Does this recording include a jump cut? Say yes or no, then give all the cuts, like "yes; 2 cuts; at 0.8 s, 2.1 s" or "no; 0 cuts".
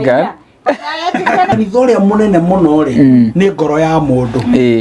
yes; 1 cut; at 1.5 s